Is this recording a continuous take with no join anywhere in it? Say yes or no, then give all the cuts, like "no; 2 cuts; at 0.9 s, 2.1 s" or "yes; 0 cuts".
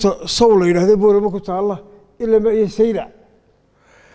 yes; 0 cuts